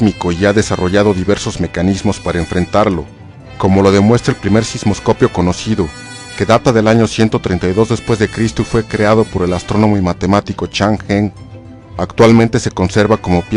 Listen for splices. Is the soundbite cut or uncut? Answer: cut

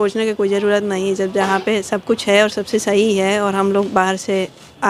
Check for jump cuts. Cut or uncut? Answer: uncut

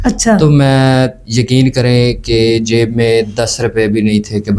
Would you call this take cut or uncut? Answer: uncut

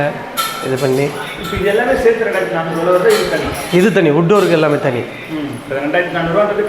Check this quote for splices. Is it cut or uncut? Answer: uncut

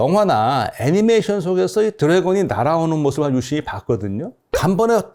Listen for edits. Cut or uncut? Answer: uncut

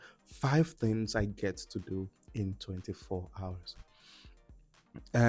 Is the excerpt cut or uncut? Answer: uncut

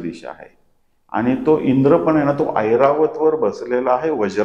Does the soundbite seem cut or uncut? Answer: uncut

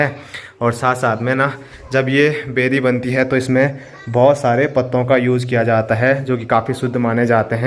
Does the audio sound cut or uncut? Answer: uncut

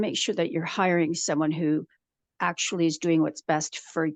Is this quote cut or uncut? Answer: uncut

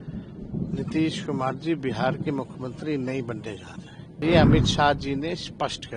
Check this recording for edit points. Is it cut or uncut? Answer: cut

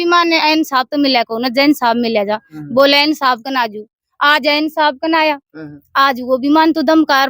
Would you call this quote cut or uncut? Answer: uncut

